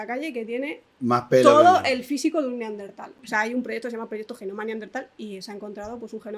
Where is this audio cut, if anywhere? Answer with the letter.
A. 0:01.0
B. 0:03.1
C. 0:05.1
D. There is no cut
B